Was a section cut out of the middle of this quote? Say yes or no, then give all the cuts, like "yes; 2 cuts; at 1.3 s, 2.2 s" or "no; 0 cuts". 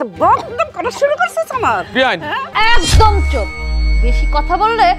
yes; 1 cut; at 2.4 s